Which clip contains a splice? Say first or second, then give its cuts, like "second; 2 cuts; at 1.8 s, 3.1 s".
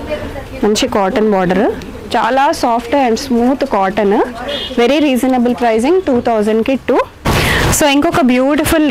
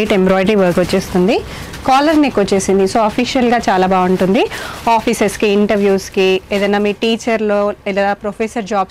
first; 1 cut; at 7.2 s